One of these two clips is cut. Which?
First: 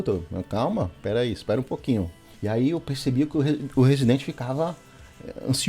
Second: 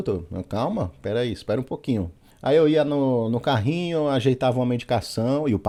first; 1 cut; at 2.2 s

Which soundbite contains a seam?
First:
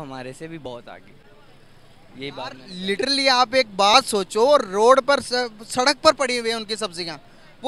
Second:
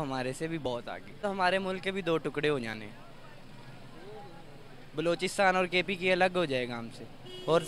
second; 1 cut; at 1.2 s

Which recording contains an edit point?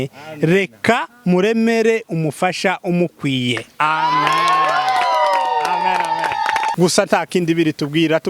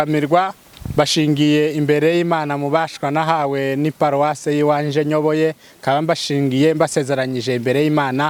first; 1 cut; at 6.7 s

